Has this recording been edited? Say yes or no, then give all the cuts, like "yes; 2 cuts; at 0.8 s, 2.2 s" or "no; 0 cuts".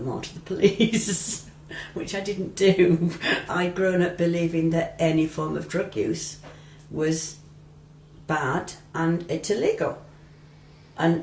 no; 0 cuts